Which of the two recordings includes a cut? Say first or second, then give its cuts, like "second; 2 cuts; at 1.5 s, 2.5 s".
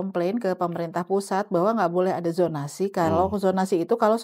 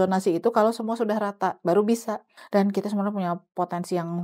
second; 1 cut; at 2.3 s